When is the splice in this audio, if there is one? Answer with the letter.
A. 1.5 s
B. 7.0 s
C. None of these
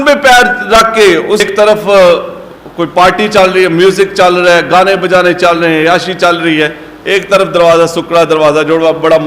A